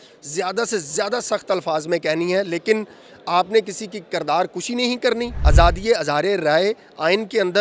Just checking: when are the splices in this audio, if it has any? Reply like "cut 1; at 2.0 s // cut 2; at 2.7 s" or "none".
cut 1; at 5.4 s